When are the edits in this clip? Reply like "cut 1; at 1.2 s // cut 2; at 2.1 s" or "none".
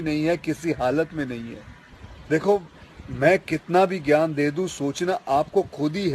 cut 1; at 2.0 s